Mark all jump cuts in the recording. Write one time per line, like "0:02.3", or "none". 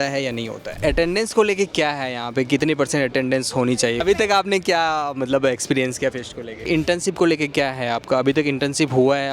0:00.8
0:04.0
0:06.7

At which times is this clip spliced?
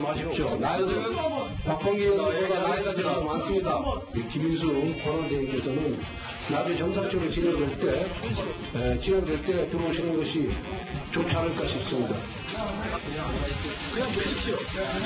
0:03.2

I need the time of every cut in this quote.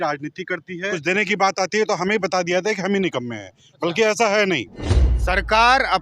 0:00.9

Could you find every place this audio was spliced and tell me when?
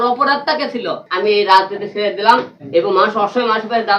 0:01.0
0:02.6

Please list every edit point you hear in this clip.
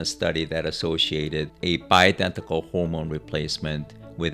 0:01.5

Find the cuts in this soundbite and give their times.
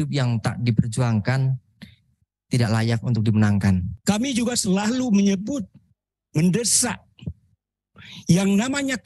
0:03.9

